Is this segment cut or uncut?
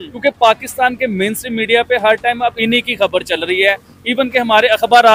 uncut